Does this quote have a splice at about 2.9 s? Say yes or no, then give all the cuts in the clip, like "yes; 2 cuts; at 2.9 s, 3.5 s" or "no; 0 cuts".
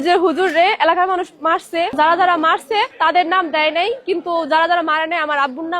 yes; 2 cuts; at 1.9 s, 2.9 s